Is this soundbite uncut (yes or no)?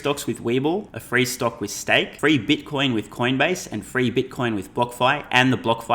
no